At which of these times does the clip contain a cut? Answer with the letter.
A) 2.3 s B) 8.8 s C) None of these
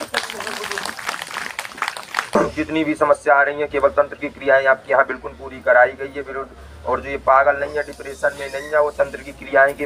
A